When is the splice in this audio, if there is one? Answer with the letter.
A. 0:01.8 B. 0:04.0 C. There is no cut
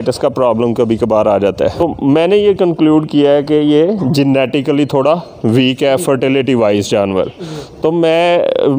A